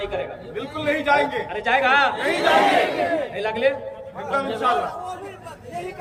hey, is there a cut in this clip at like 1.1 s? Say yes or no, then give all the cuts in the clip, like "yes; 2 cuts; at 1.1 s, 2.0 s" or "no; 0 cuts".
no; 0 cuts